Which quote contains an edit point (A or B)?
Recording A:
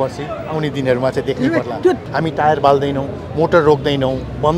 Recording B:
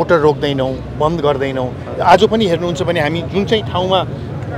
A